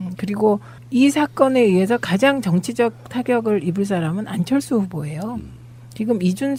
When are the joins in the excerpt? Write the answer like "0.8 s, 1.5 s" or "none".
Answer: none